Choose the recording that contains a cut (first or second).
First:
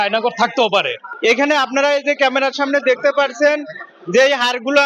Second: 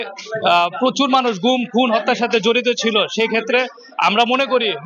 first